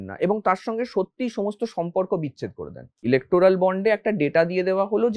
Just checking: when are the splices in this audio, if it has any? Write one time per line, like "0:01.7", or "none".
0:02.9